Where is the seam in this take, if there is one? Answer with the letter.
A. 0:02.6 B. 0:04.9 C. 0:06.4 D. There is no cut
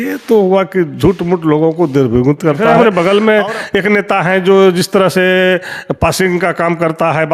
A